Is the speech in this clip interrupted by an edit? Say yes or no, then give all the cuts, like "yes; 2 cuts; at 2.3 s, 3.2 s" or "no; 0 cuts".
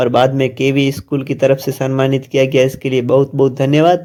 no; 0 cuts